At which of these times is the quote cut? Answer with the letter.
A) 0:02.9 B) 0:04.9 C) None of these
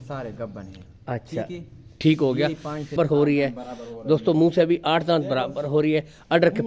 A